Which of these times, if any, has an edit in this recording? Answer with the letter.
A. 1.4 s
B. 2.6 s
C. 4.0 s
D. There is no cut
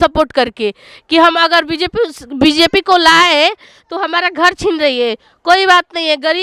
D